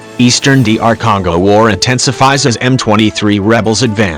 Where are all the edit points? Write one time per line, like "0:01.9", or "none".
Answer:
none